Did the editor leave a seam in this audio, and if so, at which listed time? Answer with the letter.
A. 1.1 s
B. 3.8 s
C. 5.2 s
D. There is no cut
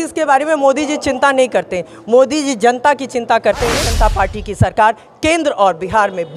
B